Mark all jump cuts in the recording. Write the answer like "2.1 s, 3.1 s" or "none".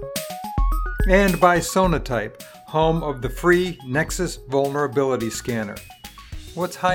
1.1 s